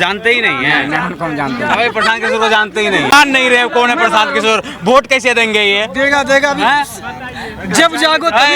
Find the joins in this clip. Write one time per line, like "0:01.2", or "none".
0:03.1